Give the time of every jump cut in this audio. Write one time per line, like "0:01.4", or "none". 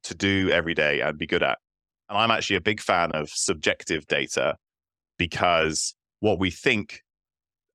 0:02.1